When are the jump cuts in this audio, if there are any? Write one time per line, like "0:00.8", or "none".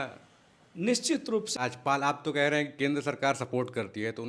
0:01.5